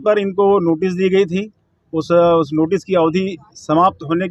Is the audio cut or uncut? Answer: uncut